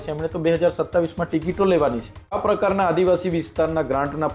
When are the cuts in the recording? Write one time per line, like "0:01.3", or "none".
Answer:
0:02.4